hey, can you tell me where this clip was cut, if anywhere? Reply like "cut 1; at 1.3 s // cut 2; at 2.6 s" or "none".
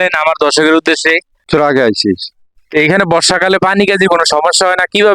cut 1; at 1.5 s